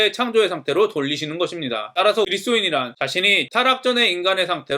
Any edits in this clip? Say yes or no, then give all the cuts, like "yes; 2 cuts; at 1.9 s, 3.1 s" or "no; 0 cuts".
yes; 2 cuts; at 2.3 s, 3.4 s